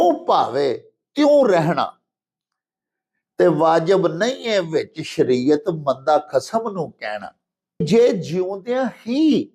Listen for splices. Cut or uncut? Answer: cut